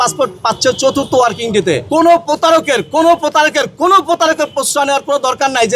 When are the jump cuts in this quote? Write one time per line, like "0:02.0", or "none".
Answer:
0:01.8